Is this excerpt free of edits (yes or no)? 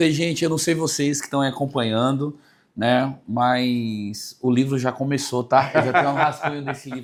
yes